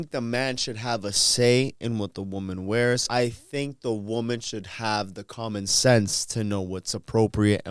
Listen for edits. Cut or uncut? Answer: cut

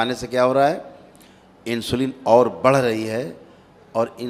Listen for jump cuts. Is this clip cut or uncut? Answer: uncut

